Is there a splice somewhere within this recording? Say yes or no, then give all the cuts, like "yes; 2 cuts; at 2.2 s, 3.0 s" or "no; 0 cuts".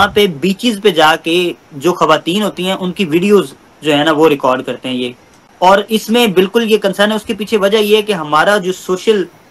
no; 0 cuts